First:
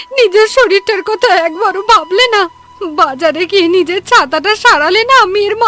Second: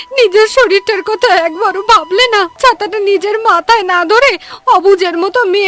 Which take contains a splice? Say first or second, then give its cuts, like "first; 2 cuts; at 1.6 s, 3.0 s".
second; 1 cut; at 2.6 s